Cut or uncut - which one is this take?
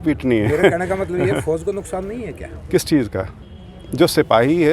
cut